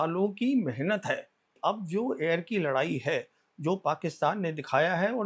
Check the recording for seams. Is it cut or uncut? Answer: cut